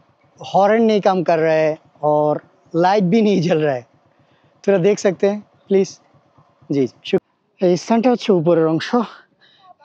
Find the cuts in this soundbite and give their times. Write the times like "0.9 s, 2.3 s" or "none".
7.2 s